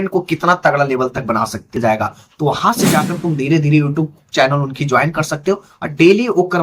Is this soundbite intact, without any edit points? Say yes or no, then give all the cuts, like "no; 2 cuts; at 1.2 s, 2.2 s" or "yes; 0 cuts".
no; 1 cut; at 1.8 s